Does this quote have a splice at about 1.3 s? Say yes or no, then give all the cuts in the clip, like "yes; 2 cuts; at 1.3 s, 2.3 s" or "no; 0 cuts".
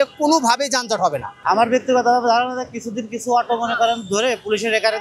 yes; 1 cut; at 1.3 s